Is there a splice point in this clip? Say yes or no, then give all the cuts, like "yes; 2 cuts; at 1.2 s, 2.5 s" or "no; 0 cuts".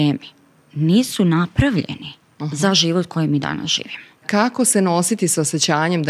yes; 1 cut; at 4.3 s